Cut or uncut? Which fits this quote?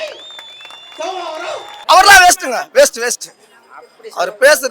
cut